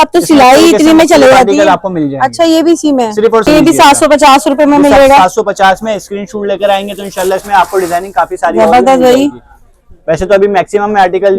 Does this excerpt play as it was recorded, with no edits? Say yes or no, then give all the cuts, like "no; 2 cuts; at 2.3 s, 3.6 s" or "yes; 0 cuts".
no; 1 cut; at 3.5 s